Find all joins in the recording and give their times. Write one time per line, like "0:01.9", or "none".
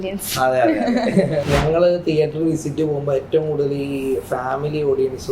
0:01.5